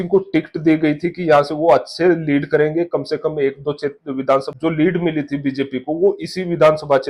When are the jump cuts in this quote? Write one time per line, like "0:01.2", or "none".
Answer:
0:04.5

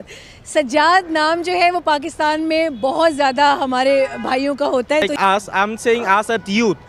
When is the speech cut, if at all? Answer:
0:05.1

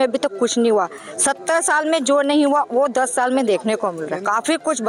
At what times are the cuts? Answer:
none

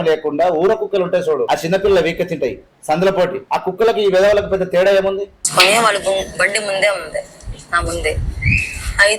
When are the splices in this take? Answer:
0:01.4
0:02.7
0:03.4
0:05.4

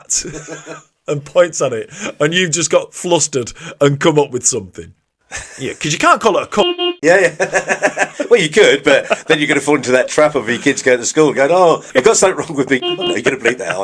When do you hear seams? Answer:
none

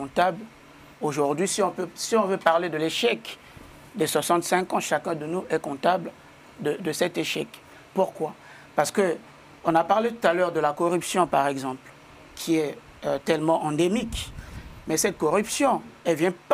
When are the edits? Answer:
none

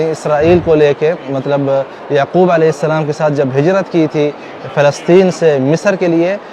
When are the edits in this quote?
none

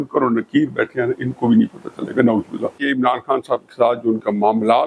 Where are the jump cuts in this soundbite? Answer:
0:02.8

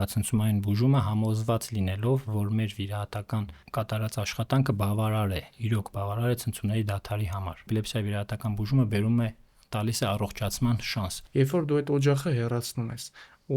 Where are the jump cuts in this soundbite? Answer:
0:07.7
0:11.1

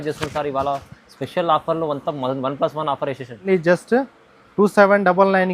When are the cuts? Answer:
0:03.5

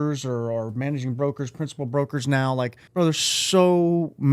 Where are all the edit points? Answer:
0:02.8

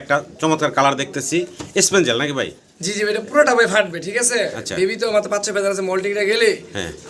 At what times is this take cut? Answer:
none

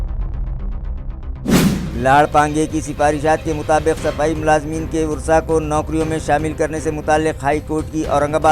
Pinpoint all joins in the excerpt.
0:01.6

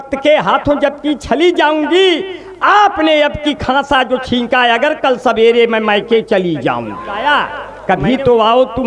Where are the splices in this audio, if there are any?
0:07.2

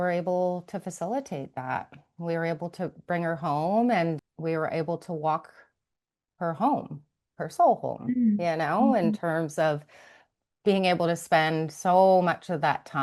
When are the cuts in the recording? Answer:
0:04.2

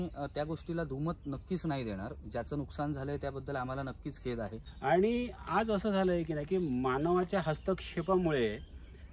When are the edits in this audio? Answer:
0:04.6

